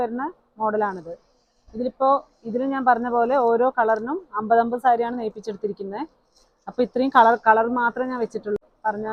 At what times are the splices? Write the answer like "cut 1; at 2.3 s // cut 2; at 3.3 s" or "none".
none